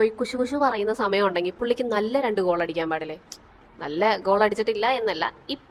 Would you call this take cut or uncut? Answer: uncut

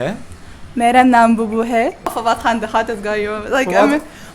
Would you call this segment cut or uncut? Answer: cut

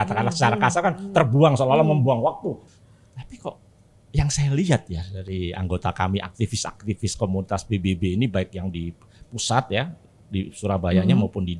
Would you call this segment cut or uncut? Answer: cut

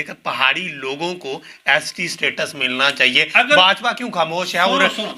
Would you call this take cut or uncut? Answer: uncut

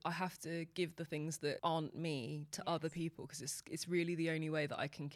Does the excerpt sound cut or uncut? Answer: uncut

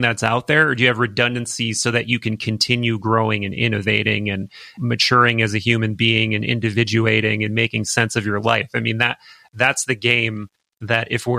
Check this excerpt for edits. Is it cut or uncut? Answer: uncut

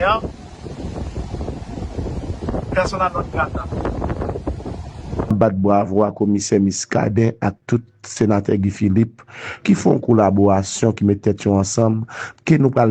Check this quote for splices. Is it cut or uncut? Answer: cut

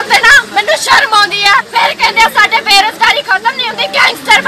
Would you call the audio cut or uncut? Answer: cut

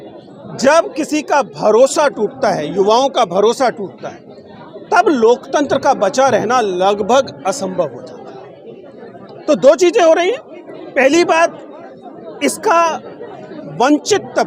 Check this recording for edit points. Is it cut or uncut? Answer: uncut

